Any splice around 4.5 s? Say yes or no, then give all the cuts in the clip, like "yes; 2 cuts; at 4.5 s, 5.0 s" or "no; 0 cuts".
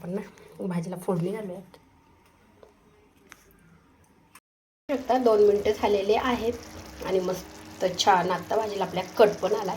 yes; 1 cut; at 4.5 s